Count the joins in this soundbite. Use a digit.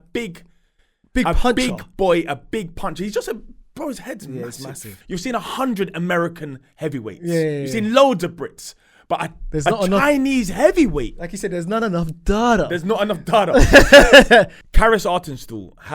2